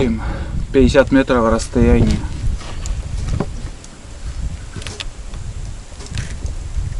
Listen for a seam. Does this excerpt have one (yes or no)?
no